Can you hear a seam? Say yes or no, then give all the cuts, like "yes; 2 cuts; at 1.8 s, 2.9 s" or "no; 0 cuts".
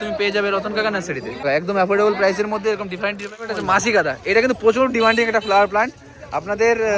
yes; 2 cuts; at 1.4 s, 3.5 s